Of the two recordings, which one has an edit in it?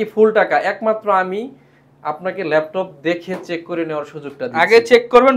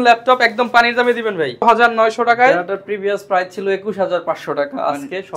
second; 1 cut; at 1.6 s

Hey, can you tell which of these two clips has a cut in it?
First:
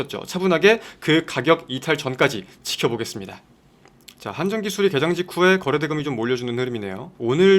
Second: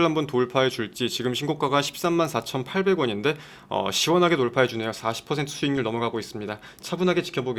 first; 1 cut; at 3.8 s

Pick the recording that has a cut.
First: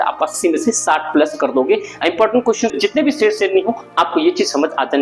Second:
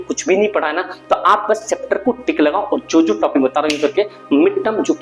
first; 1 cut; at 2.7 s

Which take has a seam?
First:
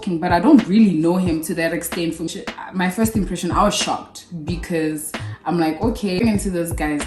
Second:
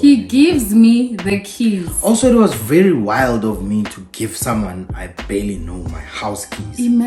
first; 2 cuts; at 2.3 s, 6.2 s

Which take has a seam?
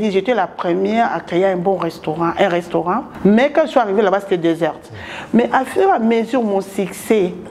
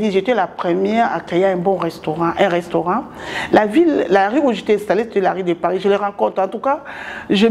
first; 1 cut; at 3.1 s

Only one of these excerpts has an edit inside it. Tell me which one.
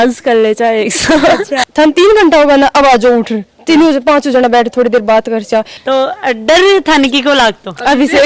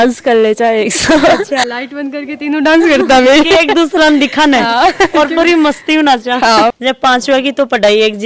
first; 2 cuts; at 1.6 s, 5.7 s

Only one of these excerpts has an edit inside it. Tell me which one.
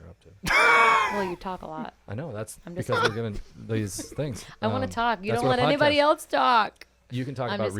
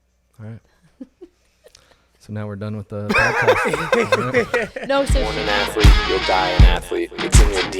second; 1 cut; at 5.2 s

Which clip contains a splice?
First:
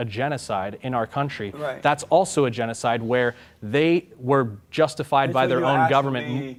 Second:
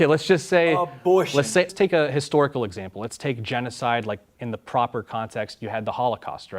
second; 1 cut; at 1.7 s

